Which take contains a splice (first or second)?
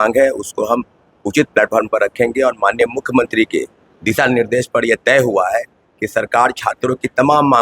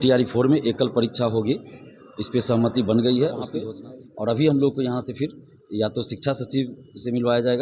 second